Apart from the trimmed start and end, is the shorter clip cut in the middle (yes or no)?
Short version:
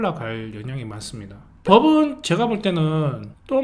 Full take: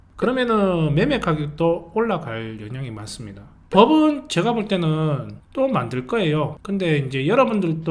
no